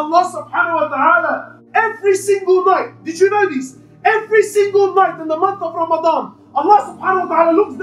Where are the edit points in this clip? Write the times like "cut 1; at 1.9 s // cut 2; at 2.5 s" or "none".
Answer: cut 1; at 1.6 s